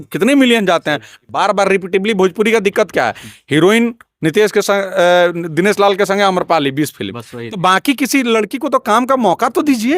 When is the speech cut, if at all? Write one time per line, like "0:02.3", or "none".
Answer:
0:01.2